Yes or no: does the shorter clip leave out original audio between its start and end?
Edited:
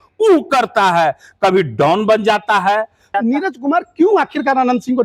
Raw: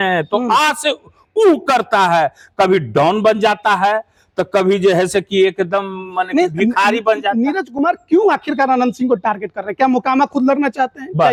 yes